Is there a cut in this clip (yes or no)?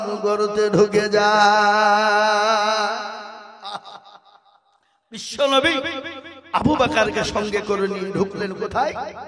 no